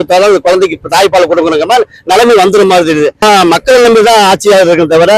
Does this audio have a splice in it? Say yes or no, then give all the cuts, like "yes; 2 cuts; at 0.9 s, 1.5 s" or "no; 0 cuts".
yes; 1 cut; at 3.2 s